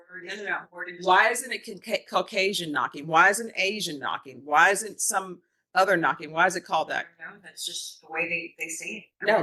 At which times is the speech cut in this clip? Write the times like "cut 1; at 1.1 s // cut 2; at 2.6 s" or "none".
none